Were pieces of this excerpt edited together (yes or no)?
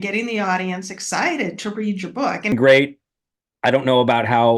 yes